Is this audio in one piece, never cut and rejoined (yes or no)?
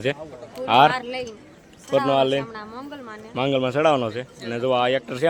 yes